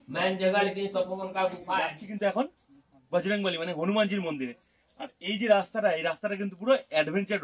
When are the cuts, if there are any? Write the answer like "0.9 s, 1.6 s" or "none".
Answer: 2.0 s